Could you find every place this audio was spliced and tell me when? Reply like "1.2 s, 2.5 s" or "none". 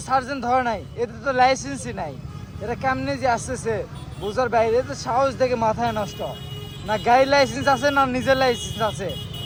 none